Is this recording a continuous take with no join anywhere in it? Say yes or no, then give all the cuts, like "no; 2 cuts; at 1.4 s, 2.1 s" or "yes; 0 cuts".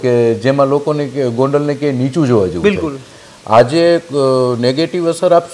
yes; 0 cuts